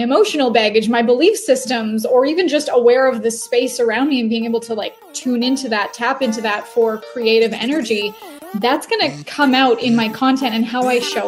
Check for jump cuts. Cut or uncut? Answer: uncut